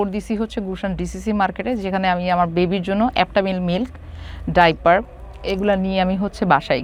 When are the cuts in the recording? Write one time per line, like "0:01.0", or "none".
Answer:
none

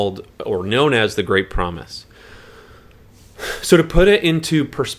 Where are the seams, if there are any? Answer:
none

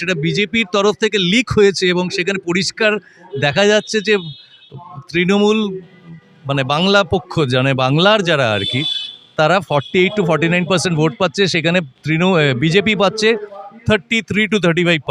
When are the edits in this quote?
none

